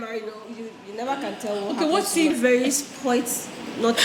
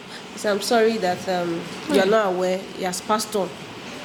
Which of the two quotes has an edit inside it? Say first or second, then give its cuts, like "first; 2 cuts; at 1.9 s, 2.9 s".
first; 1 cut; at 2.3 s